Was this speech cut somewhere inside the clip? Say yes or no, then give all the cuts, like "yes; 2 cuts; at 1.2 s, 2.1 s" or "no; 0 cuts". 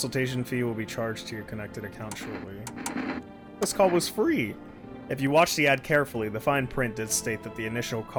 no; 0 cuts